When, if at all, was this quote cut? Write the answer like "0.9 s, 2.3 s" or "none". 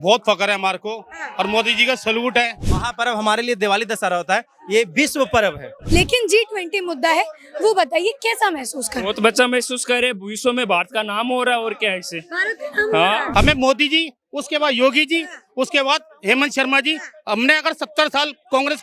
2.7 s, 5.7 s, 13.3 s